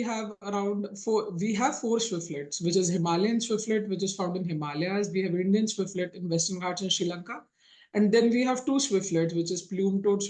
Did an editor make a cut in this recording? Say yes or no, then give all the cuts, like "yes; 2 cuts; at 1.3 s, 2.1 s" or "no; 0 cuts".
no; 0 cuts